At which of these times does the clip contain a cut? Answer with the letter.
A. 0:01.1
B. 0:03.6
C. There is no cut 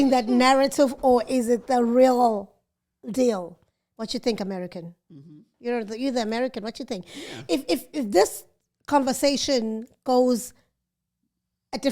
B